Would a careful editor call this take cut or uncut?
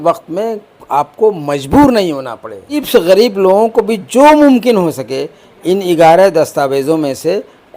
cut